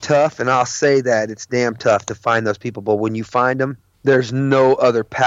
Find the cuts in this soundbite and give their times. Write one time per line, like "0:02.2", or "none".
0:03.9